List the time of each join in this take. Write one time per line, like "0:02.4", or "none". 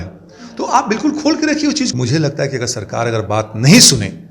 0:01.9